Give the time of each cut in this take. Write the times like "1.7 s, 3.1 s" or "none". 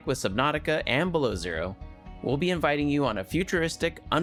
none

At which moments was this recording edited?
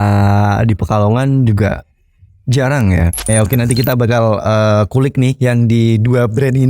3.3 s

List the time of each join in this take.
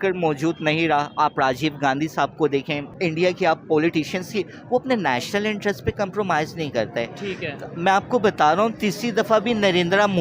2.9 s

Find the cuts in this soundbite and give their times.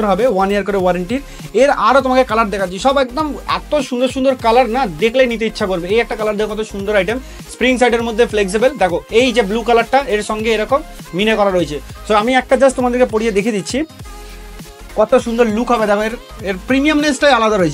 none

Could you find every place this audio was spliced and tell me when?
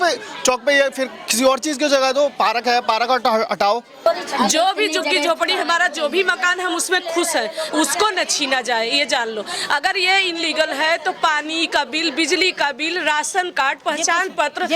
4.1 s

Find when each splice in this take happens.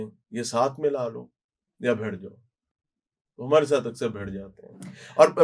none

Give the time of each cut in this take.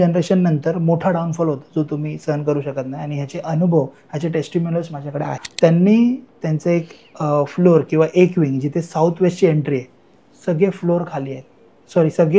5.5 s

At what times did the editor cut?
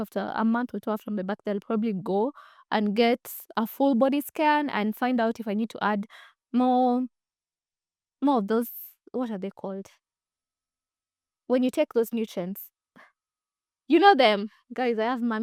none

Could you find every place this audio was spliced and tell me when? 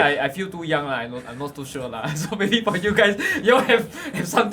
none

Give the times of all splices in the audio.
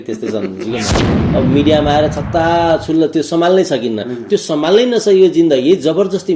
1.2 s

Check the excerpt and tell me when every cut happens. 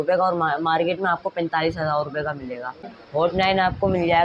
2.9 s

